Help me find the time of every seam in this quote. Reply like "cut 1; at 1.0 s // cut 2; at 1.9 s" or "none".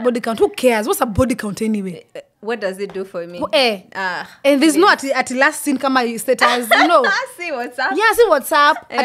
none